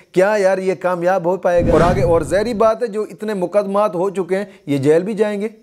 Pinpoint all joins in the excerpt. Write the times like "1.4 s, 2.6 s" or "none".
1.7 s